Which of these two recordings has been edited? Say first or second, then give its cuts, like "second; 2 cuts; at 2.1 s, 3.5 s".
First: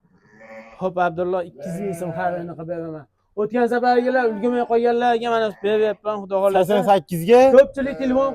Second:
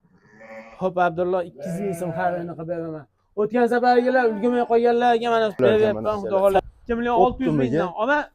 second; 1 cut; at 6.6 s